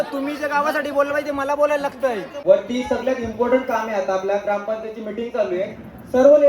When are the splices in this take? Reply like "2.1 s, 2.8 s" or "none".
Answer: 2.4 s